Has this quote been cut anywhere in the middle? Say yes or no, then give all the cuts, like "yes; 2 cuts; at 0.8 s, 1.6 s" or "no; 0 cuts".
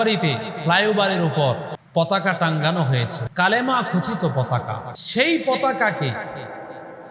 yes; 3 cuts; at 1.7 s, 3.2 s, 4.9 s